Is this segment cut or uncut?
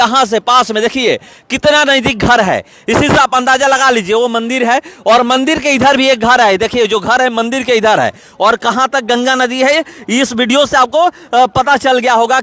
uncut